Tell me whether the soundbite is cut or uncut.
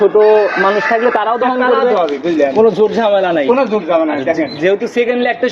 uncut